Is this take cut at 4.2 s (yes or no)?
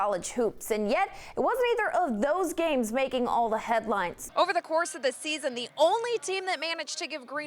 yes